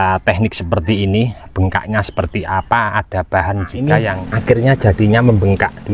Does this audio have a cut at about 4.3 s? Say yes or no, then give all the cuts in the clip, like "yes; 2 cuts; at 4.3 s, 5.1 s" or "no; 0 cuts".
yes; 1 cut; at 4.3 s